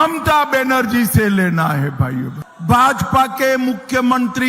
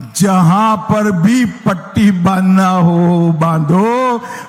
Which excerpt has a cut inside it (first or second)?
first